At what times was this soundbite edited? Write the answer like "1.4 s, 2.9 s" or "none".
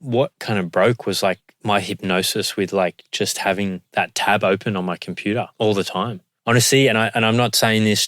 6.3 s